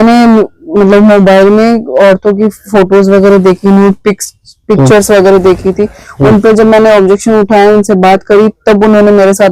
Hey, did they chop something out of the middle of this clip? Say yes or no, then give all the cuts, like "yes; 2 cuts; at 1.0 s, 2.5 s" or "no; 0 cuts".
no; 0 cuts